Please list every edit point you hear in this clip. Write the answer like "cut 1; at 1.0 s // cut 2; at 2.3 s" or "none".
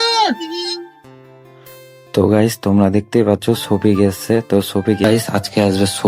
cut 1; at 5.0 s